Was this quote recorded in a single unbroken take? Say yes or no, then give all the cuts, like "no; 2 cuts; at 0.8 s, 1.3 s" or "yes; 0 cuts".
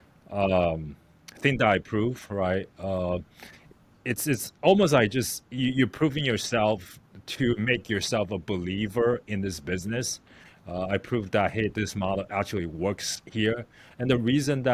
yes; 0 cuts